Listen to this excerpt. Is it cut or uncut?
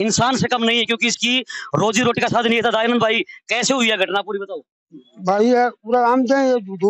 uncut